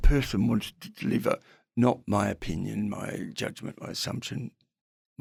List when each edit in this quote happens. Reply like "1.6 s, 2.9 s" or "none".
none